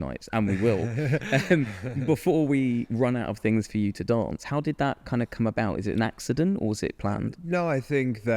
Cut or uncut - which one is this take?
uncut